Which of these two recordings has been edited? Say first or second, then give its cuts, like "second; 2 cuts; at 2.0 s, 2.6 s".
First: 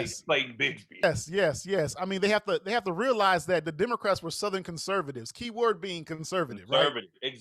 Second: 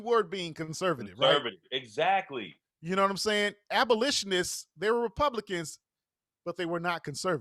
first; 1 cut; at 1.0 s